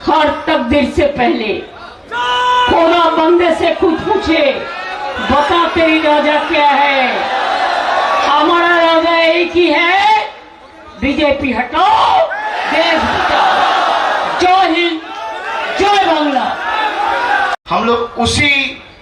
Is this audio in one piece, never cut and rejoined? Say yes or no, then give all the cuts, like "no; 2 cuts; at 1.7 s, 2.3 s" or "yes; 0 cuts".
no; 1 cut; at 17.6 s